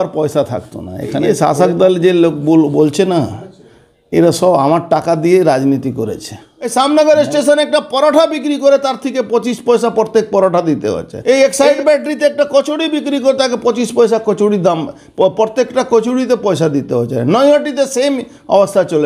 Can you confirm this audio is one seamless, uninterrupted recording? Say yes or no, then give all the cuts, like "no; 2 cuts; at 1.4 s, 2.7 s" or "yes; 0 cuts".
no; 3 cuts; at 1.3 s, 6.6 s, 11.1 s